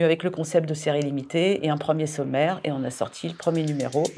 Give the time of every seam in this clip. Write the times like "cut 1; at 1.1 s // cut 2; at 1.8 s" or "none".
none